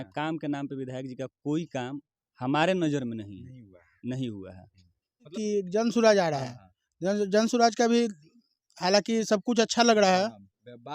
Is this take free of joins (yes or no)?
no